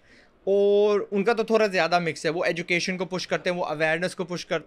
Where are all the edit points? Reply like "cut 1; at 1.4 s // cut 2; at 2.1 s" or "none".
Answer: none